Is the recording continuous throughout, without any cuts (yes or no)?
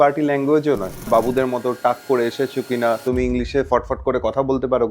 no